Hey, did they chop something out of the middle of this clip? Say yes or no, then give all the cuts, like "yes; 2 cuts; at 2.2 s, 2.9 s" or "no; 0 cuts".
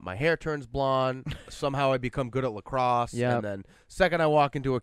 no; 0 cuts